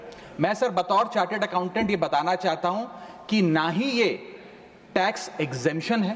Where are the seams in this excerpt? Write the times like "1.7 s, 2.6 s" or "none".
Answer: none